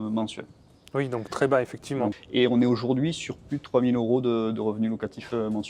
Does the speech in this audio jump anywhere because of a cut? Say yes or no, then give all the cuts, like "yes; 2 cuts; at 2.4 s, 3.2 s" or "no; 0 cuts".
yes; 1 cut; at 2.1 s